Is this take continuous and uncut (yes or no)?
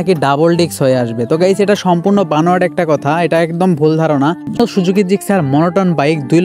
no